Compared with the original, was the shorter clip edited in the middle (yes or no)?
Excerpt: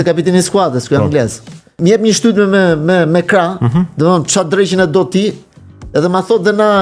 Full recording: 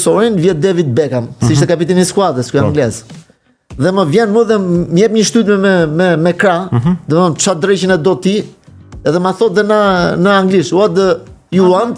yes